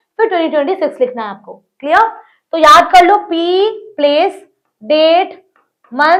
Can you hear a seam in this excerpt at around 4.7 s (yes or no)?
no